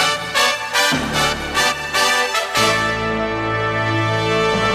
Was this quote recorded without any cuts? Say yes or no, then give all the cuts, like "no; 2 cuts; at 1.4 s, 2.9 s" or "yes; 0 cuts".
no; 1 cut; at 2.2 s